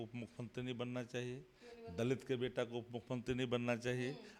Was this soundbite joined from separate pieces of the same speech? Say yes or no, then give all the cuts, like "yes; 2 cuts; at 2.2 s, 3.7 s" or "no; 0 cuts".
no; 0 cuts